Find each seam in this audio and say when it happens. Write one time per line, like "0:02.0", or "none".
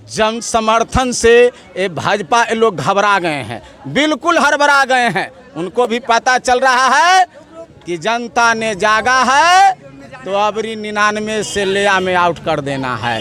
none

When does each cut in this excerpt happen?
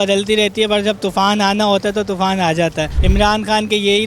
0:03.0

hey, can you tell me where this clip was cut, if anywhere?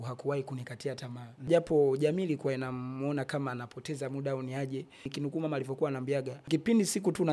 0:01.5
0:05.1
0:06.4

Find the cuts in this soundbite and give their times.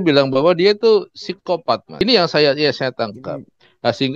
0:01.9

